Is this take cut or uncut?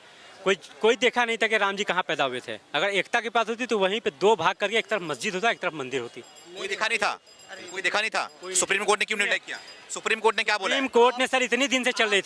uncut